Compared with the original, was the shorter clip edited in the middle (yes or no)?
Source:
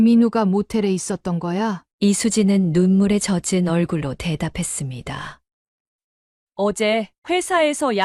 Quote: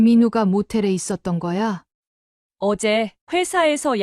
yes